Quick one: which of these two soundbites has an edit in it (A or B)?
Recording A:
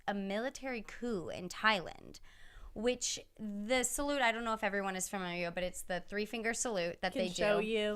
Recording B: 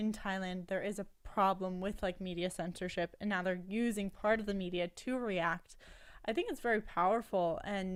A